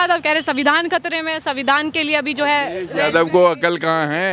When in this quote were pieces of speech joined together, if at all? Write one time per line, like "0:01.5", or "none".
none